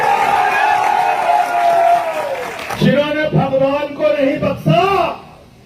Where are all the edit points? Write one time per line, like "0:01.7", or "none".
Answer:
0:02.6